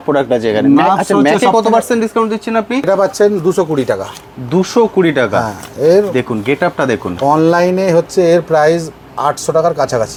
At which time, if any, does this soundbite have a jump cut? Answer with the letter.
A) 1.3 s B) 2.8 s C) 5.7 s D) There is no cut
D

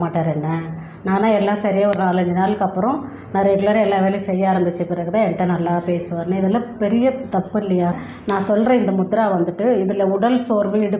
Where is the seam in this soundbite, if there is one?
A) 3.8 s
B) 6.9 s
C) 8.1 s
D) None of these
C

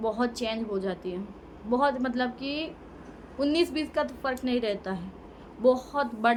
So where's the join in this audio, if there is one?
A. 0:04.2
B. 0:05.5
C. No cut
C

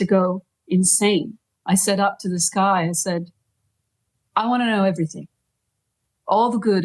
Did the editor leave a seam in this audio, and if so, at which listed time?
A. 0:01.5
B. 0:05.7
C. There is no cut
A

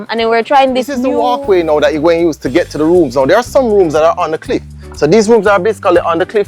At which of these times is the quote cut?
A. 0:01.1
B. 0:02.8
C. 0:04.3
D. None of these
A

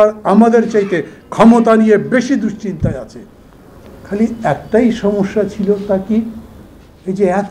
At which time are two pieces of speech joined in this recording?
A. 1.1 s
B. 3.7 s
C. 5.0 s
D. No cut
D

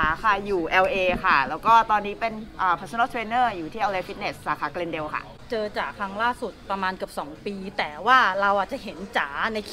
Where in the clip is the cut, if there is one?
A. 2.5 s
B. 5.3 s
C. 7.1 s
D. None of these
D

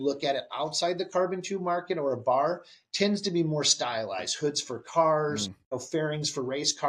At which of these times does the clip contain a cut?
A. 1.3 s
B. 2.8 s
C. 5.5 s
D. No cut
C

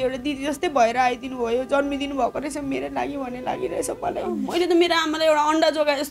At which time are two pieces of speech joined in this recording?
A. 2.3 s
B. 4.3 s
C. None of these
B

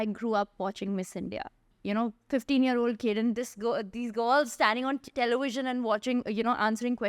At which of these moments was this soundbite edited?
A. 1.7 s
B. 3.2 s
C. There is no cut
A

